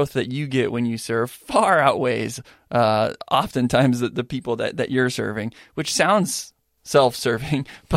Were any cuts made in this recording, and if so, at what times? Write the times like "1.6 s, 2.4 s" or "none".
none